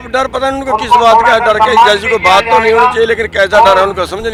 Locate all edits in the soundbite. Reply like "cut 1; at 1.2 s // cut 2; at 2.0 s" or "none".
none